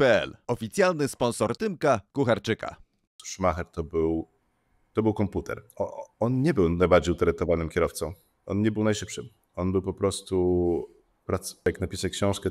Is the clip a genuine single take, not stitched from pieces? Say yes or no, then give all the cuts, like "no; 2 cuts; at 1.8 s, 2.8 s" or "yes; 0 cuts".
no; 2 cuts; at 3.0 s, 11.7 s